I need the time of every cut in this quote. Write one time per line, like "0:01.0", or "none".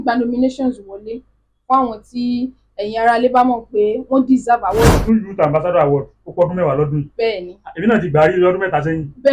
0:04.9